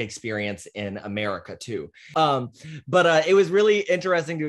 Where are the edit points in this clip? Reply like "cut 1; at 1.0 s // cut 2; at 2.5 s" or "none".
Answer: cut 1; at 2.0 s

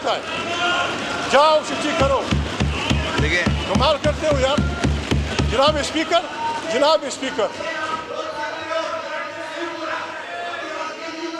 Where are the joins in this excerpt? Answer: none

